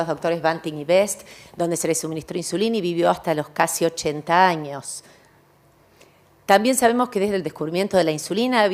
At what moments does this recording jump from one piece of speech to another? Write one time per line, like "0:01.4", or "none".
0:04.0